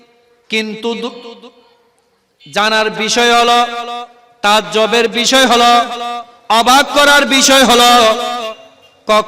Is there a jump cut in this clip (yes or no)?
no